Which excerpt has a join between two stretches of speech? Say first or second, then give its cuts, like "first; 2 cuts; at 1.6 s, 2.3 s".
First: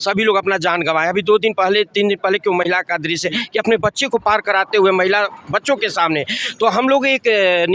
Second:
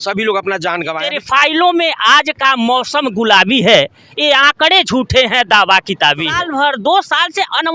second; 2 cuts; at 1.0 s, 6.5 s